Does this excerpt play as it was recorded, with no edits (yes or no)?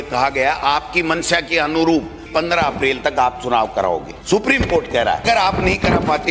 no